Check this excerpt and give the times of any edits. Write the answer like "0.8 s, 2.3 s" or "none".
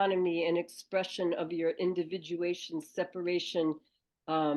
none